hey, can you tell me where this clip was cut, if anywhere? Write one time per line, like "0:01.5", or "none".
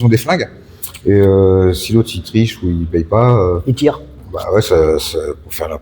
none